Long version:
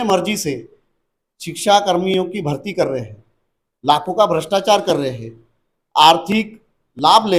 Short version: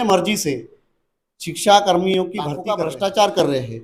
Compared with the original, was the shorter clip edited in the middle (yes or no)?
yes